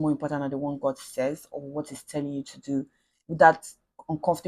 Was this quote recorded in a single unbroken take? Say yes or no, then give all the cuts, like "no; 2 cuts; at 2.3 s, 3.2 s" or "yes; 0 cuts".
yes; 0 cuts